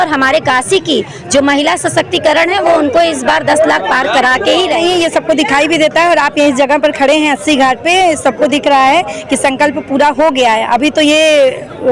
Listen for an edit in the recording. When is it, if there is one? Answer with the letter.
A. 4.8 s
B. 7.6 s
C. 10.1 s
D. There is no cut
A